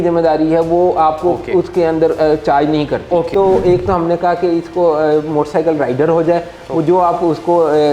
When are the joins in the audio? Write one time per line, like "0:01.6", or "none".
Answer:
0:03.3